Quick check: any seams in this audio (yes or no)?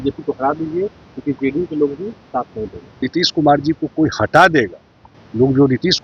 yes